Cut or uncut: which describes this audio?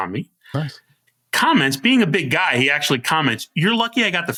uncut